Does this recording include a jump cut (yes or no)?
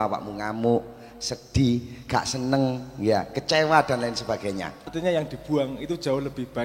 yes